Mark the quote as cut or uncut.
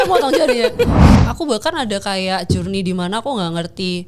cut